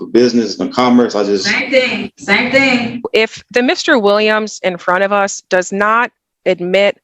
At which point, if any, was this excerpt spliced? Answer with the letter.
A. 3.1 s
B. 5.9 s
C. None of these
A